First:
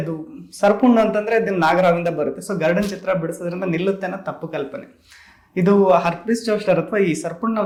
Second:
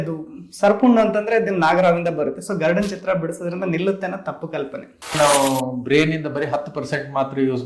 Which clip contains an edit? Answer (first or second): second